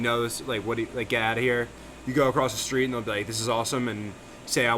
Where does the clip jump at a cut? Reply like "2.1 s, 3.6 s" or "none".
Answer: none